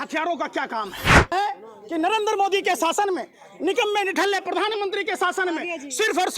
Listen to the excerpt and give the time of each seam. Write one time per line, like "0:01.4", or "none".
0:01.3